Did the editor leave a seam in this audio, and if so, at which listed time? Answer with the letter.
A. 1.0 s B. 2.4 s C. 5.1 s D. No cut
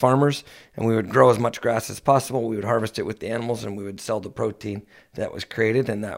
D